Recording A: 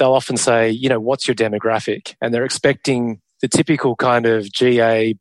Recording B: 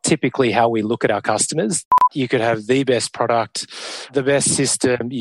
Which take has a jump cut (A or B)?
B